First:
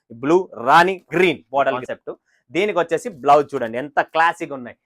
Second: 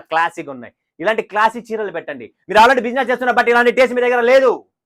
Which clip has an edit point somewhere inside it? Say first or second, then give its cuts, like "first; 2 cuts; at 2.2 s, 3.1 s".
first; 1 cut; at 1.9 s